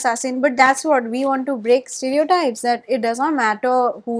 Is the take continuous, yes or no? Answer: yes